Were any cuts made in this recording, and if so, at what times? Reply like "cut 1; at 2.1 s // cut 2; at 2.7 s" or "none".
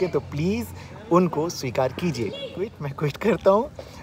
cut 1; at 2.7 s